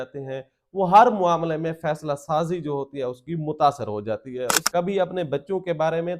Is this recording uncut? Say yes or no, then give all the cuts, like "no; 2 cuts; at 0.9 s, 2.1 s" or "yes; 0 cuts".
no; 1 cut; at 4.6 s